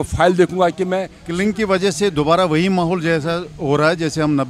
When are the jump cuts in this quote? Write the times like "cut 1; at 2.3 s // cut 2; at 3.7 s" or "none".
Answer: cut 1; at 1.2 s